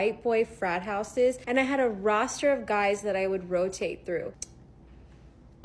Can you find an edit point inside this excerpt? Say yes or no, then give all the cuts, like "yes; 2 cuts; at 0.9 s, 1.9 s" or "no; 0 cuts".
yes; 2 cuts; at 1.4 s, 4.5 s